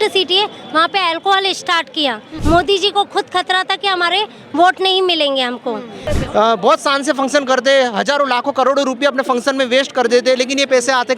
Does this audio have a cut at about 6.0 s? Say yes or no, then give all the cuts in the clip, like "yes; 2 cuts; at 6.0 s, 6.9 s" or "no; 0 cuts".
yes; 2 cuts; at 2.3 s, 6.0 s